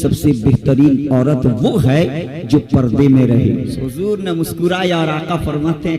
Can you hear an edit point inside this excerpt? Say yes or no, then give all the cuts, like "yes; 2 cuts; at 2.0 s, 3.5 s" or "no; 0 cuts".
yes; 1 cut; at 3.7 s